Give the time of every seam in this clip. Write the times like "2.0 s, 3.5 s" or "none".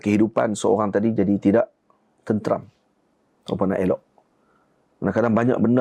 none